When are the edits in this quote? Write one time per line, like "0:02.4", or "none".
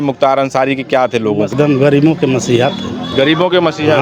0:01.5